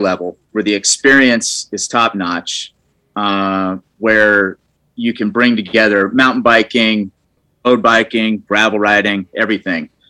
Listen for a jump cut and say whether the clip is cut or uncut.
cut